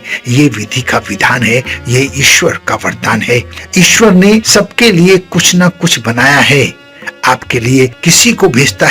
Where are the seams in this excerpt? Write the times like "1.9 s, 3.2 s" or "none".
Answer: 4.5 s, 8.0 s